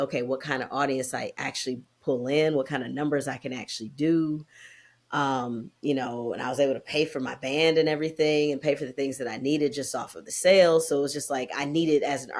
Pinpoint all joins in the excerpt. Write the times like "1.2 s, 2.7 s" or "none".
none